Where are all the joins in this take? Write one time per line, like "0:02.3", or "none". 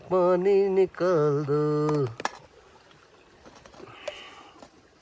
none